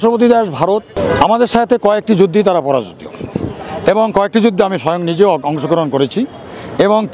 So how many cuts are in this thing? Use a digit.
1